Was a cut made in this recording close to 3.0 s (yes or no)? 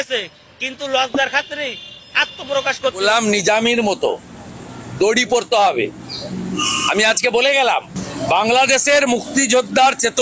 yes